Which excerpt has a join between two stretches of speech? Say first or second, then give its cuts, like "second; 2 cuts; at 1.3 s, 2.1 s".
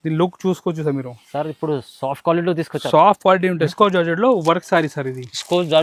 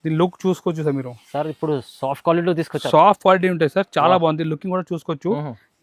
first; 1 cut; at 3.7 s